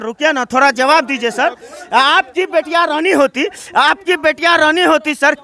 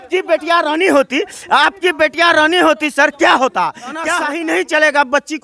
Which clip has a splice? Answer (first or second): second